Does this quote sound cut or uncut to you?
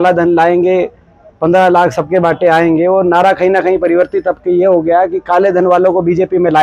uncut